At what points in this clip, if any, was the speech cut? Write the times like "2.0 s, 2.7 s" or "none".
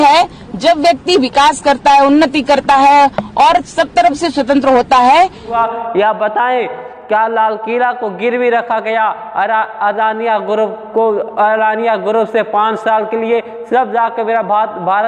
5.4 s